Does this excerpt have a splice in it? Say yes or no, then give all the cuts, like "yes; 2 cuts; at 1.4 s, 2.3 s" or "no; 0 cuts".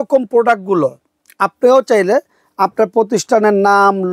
no; 0 cuts